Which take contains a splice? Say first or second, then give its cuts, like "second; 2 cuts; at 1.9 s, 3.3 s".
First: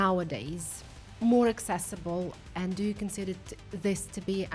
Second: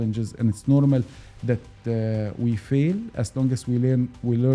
first; 1 cut; at 2.5 s